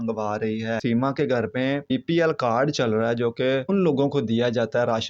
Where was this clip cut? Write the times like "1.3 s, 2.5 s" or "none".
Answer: 0.8 s, 1.9 s, 3.7 s